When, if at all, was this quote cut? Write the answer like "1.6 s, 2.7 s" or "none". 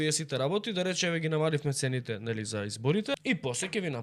3.1 s